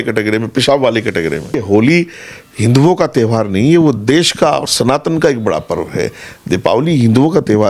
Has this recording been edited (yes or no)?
yes